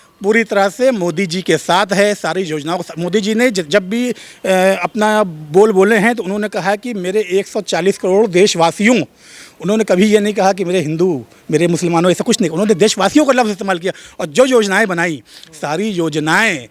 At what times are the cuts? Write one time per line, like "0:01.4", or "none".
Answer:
none

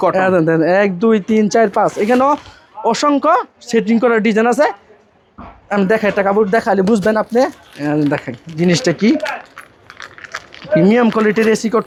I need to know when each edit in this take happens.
none

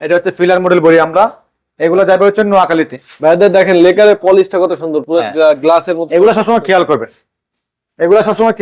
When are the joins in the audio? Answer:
none

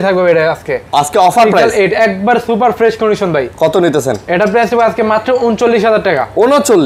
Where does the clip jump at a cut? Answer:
none

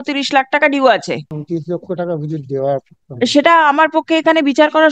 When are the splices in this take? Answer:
none

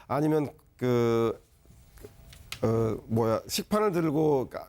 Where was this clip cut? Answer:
none

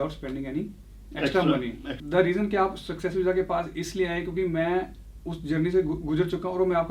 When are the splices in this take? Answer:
0:02.0

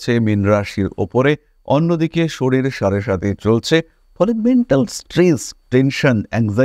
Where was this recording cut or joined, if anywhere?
none

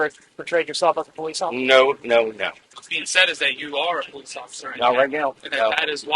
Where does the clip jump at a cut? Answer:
0:02.8

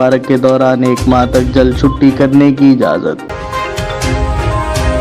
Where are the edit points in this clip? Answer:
0:03.3

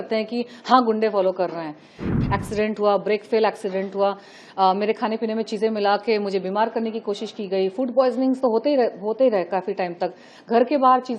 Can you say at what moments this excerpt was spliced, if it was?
0:02.0

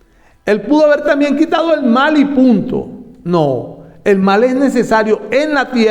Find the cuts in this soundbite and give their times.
none

